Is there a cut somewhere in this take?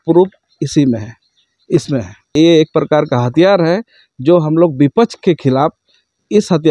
yes; 1 cut; at 2.3 s

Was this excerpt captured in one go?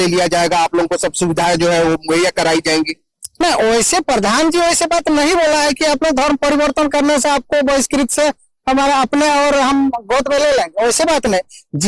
yes; 0 cuts

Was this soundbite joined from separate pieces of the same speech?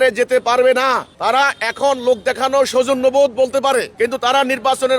yes; 2 cuts; at 1.1 s, 3.9 s

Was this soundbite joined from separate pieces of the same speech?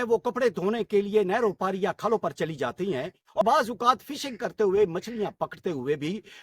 yes; 1 cut; at 3.4 s

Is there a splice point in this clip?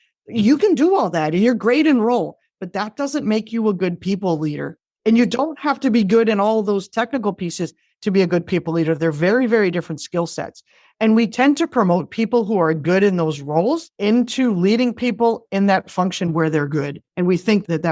no; 0 cuts

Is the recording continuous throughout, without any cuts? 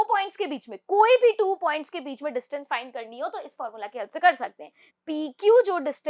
no; 1 cut; at 4.9 s

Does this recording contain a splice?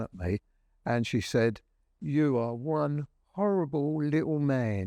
no; 0 cuts

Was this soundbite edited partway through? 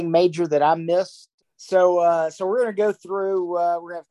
yes; 1 cut; at 1.2 s

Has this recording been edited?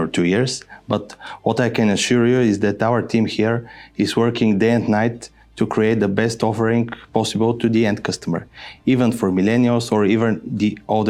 no; 0 cuts

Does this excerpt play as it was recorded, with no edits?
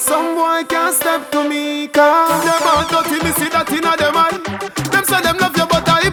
yes; 0 cuts

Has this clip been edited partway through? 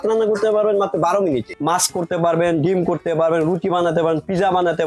yes; 1 cut; at 1.5 s

